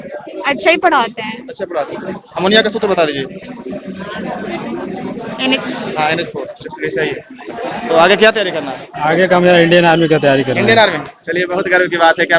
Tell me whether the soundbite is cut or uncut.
cut